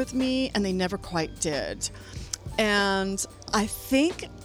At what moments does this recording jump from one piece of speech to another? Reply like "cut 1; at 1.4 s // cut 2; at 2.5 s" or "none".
cut 1; at 3.3 s